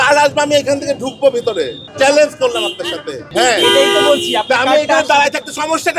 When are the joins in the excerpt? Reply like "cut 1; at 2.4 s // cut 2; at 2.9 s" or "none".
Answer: cut 1; at 1.8 s // cut 2; at 3.3 s